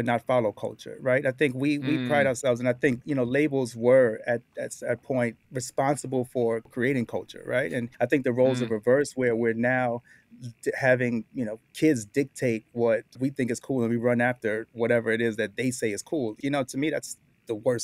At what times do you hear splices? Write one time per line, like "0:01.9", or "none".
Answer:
0:05.4
0:06.7
0:07.9
0:13.2
0:16.4

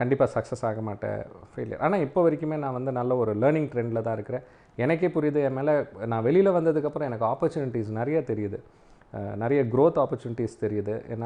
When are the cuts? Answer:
none

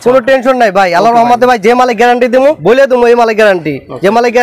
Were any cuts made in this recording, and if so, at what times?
0:02.6

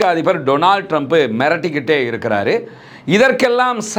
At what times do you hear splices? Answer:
none

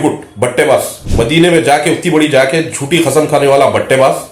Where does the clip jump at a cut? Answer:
0:01.0

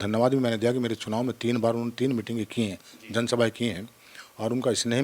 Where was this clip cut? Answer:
none

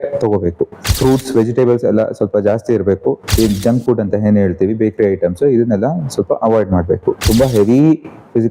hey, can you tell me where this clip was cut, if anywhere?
0:03.2
0:07.2

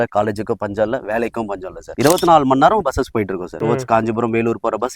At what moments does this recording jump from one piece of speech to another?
0:02.0
0:03.5

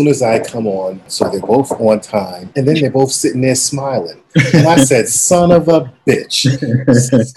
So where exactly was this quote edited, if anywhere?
0:01.0
0:02.4

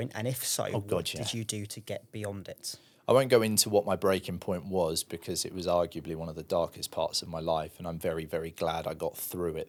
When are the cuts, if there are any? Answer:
none

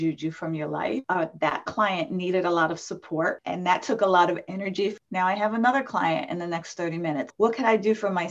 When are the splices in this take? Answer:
0:01.0
0:03.5
0:05.0

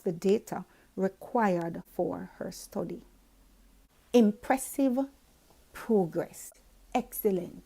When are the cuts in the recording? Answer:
0:06.4

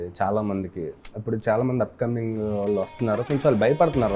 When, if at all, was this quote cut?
none

